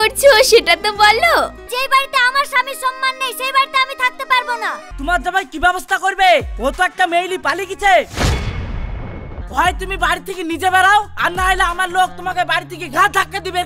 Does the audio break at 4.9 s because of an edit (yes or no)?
yes